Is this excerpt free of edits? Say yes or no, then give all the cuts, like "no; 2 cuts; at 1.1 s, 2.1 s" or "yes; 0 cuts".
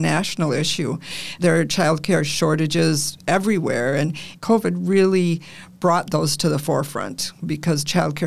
no; 2 cuts; at 1.4 s, 4.3 s